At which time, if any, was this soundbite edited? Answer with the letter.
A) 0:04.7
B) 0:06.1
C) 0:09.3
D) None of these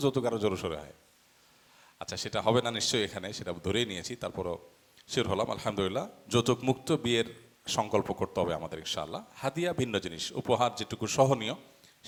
D